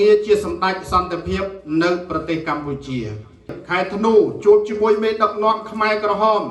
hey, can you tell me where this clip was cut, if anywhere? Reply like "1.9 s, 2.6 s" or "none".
3.6 s